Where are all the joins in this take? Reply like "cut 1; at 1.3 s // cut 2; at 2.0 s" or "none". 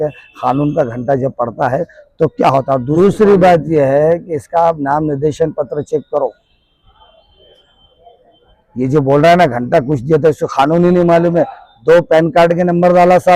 cut 1; at 2.9 s